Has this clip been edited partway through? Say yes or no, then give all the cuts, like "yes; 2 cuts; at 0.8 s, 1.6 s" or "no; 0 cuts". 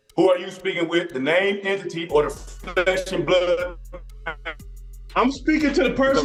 no; 0 cuts